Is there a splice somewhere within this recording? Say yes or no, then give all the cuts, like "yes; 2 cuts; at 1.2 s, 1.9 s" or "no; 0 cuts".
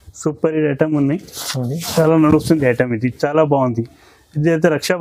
no; 0 cuts